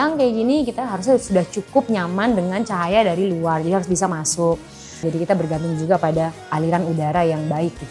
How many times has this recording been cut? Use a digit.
2